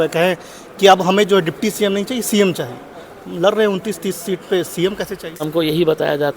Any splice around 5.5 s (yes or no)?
yes